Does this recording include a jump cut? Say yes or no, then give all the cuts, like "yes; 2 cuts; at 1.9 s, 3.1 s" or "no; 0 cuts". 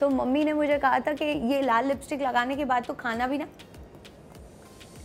no; 0 cuts